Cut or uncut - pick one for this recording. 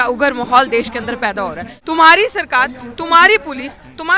cut